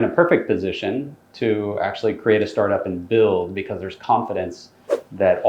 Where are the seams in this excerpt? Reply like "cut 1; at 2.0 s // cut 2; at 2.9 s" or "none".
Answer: none